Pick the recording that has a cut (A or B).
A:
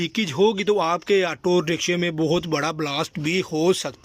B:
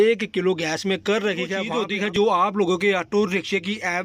B